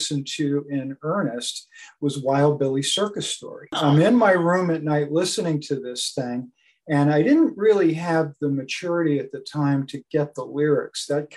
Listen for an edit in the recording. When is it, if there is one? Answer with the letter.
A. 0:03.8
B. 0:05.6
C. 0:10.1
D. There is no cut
A